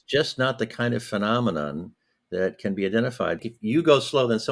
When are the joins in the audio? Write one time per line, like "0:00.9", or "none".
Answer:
0:03.4